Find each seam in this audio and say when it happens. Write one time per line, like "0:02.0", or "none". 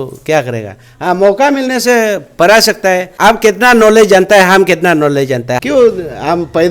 0:03.1
0:05.6